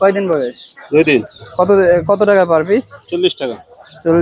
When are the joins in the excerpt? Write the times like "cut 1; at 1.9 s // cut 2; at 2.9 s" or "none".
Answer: none